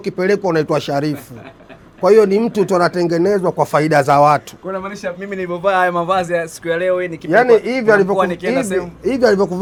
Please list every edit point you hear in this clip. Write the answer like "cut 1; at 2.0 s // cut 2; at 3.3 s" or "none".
none

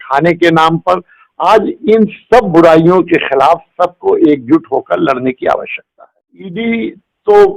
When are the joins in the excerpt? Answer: cut 1; at 6.6 s

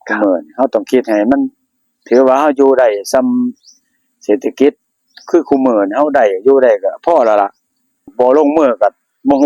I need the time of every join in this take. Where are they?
cut 1; at 8.1 s

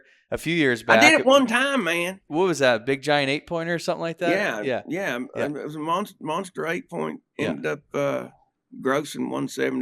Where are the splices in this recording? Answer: cut 1; at 2.2 s

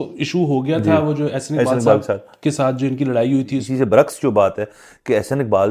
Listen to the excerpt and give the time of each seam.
cut 1; at 3.7 s

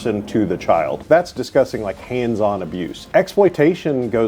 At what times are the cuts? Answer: cut 1; at 1.0 s // cut 2; at 3.0 s

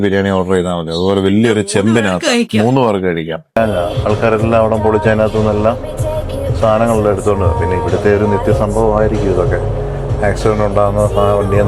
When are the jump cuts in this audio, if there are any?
cut 1; at 3.6 s

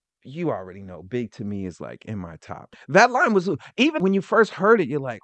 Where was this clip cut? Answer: cut 1; at 2.7 s // cut 2; at 4.0 s

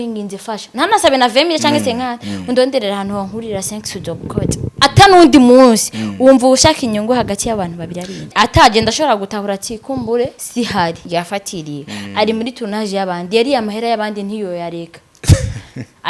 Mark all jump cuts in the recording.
cut 1; at 4.7 s // cut 2; at 8.3 s // cut 3; at 10.4 s // cut 4; at 11.0 s

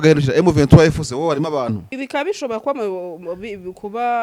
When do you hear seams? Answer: cut 1; at 1.9 s

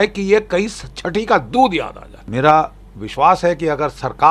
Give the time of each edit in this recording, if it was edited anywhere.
cut 1; at 2.2 s

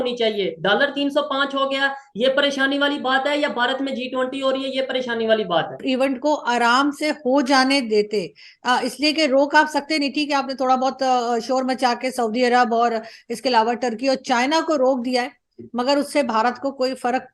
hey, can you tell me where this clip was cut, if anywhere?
cut 1; at 5.8 s

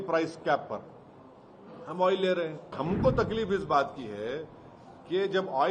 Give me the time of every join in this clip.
cut 1; at 2.8 s

